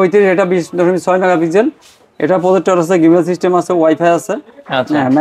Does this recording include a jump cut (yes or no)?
no